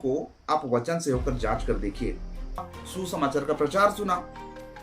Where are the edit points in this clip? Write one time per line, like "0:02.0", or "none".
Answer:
0:02.8